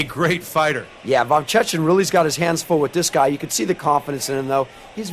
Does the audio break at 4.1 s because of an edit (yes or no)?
yes